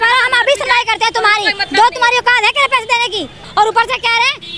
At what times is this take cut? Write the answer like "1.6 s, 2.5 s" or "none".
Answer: 3.4 s